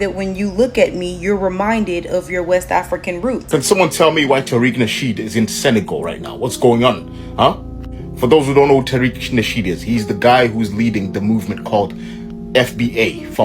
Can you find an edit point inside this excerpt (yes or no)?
yes